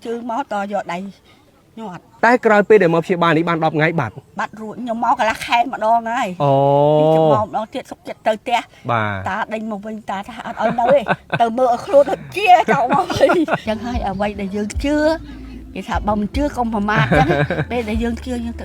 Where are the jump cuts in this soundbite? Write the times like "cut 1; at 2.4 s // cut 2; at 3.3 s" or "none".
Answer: none